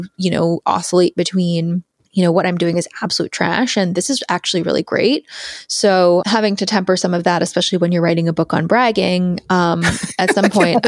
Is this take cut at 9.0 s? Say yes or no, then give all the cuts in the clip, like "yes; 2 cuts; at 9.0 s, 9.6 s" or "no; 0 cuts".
no; 2 cuts; at 1.9 s, 6.2 s